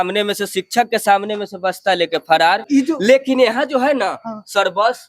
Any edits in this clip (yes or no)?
yes